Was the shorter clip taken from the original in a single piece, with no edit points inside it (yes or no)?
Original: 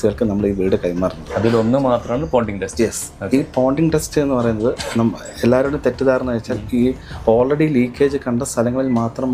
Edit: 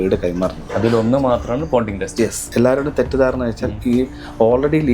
no